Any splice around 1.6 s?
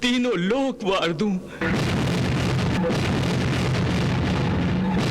yes; 2 cuts; at 1.6 s, 2.8 s

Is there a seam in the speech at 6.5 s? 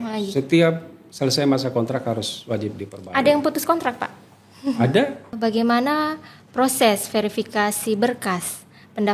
no; 1 cut; at 5.3 s

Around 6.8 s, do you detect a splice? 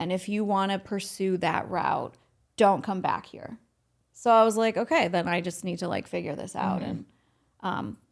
no; 0 cuts

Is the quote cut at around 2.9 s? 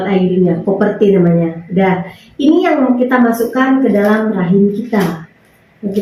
no; 0 cuts

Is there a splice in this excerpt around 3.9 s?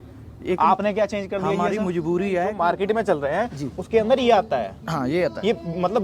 no; 1 cut; at 2.5 s

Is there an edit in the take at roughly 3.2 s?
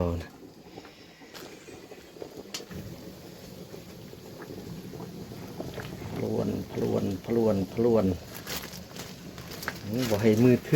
no; 1 cut; at 1.3 s

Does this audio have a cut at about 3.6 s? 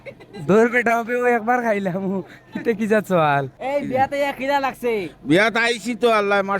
yes; 1 cut; at 3.6 s

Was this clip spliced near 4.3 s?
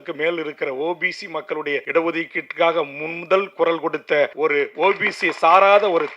yes; 2 cuts; at 1.9 s, 4.3 s

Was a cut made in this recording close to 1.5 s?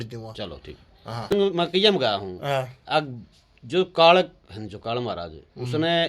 yes; 1 cut; at 1.5 s

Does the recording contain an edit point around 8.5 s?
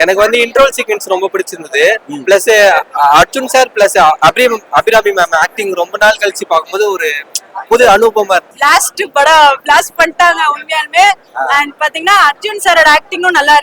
yes; 1 cut; at 8.5 s

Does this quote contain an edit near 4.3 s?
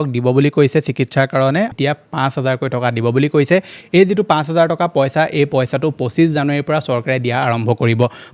no; 1 cut; at 1.7 s

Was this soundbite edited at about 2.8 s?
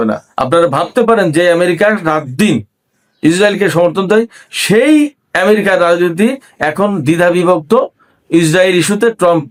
no; 0 cuts

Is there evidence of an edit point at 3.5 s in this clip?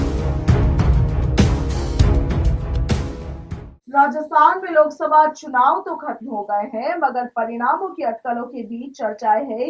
yes; 1 cut; at 3.5 s

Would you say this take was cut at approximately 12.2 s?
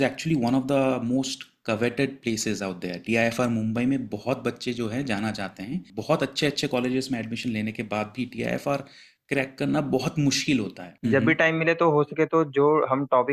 no; 2 cuts; at 5.9 s, 10.8 s

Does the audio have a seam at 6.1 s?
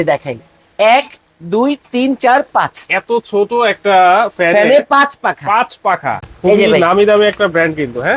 yes; 1 cut; at 6.1 s

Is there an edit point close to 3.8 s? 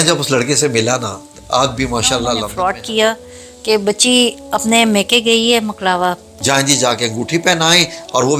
no; 2 cuts; at 2.5 s, 6.3 s

